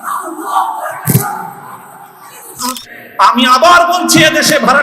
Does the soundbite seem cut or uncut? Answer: cut